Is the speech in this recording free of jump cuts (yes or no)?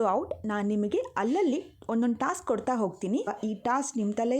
no